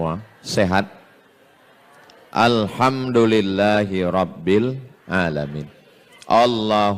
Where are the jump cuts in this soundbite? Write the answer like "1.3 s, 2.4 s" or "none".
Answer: none